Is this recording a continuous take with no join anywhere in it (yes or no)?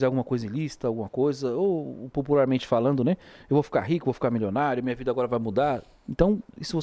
yes